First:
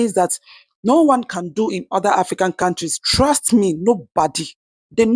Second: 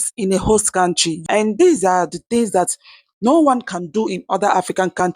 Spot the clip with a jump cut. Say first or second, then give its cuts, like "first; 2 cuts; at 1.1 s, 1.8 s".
second; 1 cut; at 1.1 s